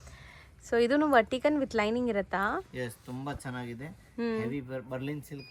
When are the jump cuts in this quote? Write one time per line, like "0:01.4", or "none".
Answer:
none